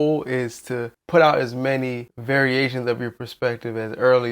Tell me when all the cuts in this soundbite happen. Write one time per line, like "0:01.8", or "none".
0:00.9
0:02.1